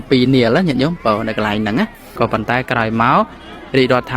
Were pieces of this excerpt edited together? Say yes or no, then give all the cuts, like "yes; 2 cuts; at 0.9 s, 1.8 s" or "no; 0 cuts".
yes; 1 cut; at 2.2 s